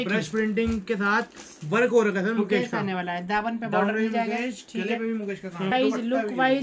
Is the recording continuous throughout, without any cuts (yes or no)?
no